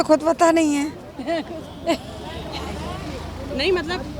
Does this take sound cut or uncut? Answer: uncut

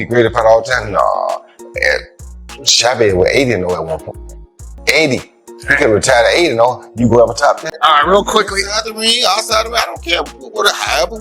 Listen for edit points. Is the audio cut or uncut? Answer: cut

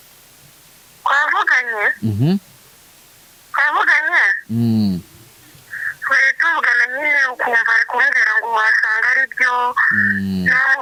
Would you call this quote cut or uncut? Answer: uncut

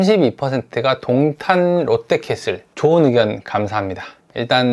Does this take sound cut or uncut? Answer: uncut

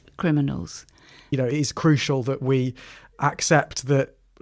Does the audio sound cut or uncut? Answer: cut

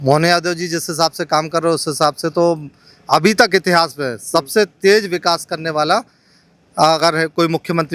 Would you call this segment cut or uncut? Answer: uncut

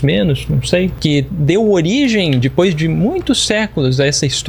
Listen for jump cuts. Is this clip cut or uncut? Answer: cut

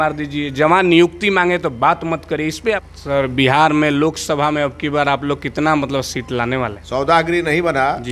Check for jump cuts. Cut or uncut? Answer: cut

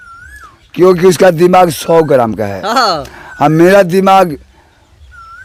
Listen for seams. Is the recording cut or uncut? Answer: uncut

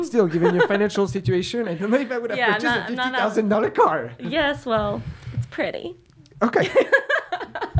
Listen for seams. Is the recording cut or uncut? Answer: uncut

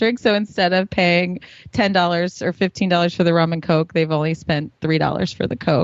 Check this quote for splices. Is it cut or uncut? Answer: uncut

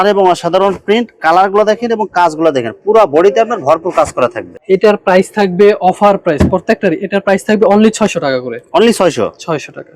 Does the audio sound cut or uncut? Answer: uncut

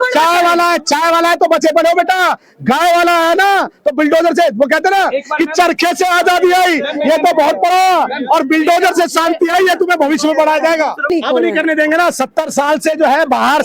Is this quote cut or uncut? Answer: cut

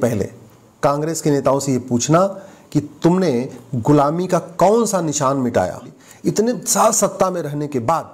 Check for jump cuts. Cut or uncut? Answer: cut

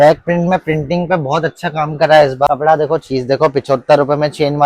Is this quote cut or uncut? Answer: cut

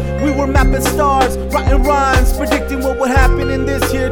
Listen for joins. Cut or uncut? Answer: uncut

